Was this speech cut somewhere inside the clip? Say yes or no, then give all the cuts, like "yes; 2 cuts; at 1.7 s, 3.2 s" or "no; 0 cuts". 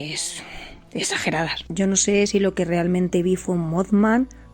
yes; 1 cut; at 1.6 s